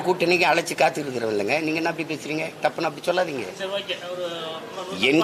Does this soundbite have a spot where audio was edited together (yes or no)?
no